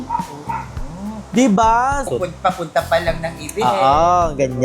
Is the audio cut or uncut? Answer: cut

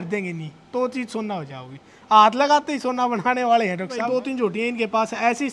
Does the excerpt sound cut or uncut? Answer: cut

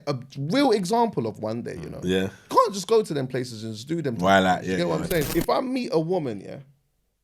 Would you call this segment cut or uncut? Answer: cut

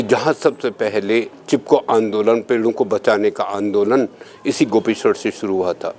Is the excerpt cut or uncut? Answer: uncut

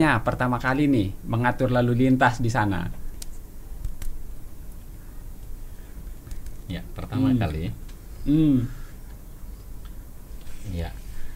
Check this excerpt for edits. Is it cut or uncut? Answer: cut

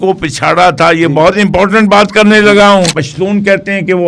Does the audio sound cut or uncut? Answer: cut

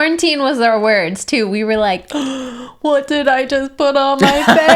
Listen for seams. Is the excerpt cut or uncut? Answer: uncut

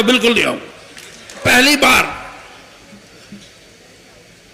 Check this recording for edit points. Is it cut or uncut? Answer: cut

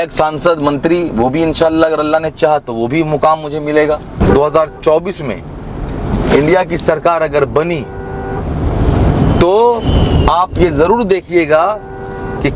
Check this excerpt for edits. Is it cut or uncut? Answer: cut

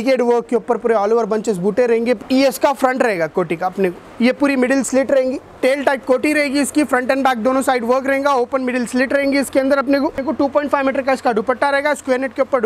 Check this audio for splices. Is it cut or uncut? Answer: cut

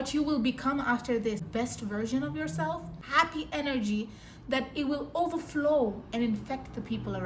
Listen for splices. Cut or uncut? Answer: cut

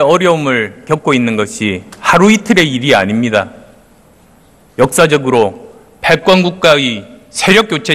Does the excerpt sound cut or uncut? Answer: cut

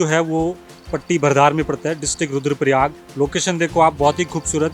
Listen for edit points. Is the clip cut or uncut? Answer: cut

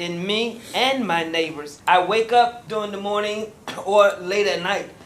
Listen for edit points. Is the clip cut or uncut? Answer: cut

